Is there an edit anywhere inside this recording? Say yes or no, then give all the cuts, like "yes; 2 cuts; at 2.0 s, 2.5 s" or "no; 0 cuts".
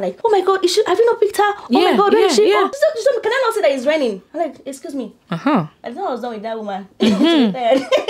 no; 0 cuts